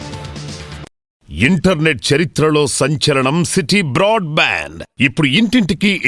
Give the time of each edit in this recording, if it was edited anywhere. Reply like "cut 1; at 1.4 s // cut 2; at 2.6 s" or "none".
cut 1; at 1.2 s